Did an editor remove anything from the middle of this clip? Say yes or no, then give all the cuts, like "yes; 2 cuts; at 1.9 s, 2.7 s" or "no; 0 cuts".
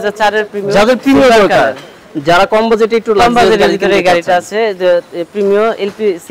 no; 0 cuts